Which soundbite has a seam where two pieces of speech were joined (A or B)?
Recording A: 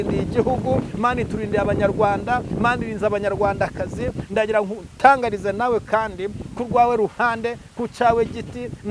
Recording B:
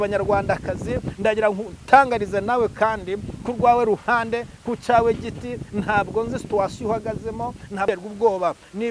B